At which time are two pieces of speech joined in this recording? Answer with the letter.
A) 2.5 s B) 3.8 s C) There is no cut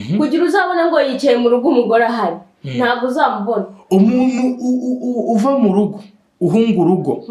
B